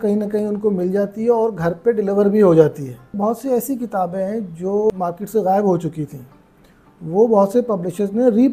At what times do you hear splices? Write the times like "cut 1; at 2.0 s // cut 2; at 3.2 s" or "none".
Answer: cut 1; at 3.1 s

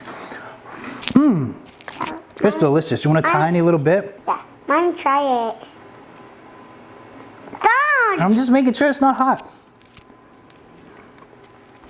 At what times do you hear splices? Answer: cut 1; at 1.0 s // cut 2; at 4.1 s // cut 3; at 5.8 s

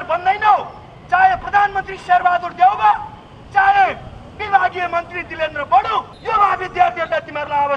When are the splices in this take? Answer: cut 1; at 6.2 s

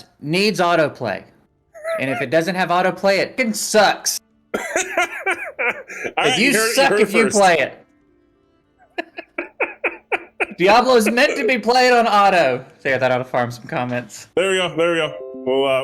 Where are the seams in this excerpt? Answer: cut 1; at 3.4 s

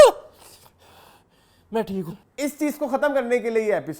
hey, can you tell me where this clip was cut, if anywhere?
cut 1; at 2.2 s

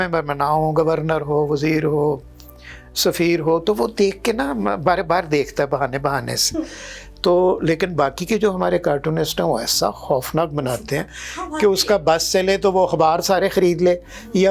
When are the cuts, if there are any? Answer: none

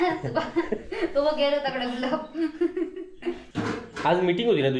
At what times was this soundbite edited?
cut 1; at 3.4 s

